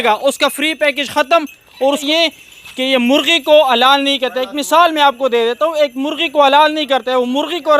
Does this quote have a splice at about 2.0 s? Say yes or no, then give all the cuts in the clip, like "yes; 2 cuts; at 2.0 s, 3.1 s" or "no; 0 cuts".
yes; 1 cut; at 2.0 s